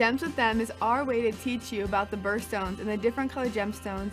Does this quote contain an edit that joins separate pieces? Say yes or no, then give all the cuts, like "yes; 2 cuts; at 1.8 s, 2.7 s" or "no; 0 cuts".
no; 0 cuts